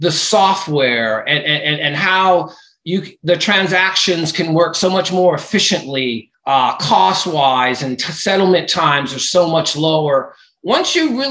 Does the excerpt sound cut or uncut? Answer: cut